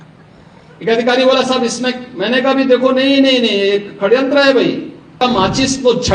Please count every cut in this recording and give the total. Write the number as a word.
one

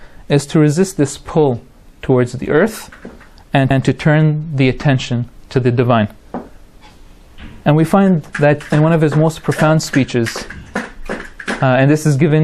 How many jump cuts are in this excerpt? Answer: zero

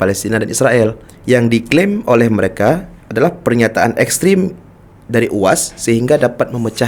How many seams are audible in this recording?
two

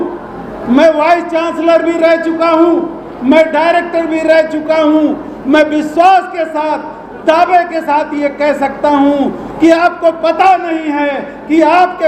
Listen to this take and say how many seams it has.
zero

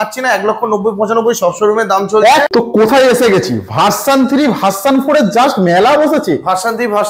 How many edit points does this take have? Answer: one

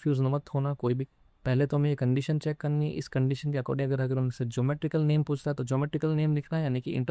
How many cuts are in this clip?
one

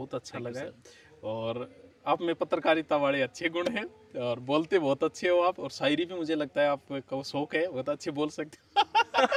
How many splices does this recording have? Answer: zero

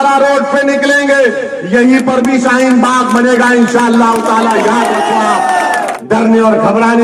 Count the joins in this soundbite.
one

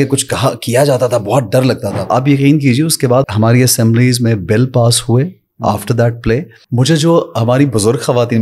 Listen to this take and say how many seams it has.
three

